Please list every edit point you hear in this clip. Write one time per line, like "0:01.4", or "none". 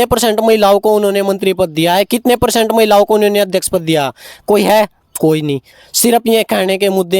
none